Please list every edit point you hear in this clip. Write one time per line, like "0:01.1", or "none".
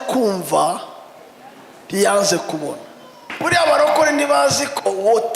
0:03.2